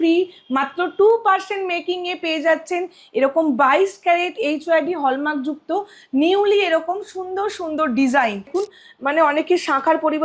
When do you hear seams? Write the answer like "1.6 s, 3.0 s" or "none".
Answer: 8.5 s